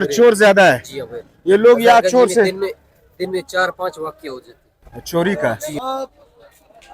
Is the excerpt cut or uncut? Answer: cut